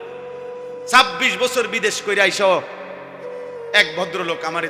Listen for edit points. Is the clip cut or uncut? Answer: cut